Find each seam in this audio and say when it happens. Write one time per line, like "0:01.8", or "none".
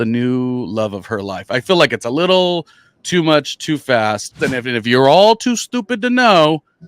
0:04.4